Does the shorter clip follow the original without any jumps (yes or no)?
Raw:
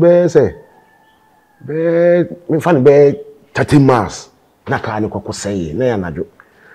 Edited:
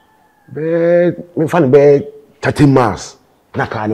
yes